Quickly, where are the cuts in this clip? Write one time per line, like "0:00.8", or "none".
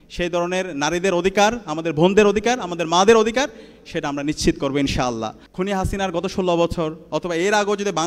0:05.4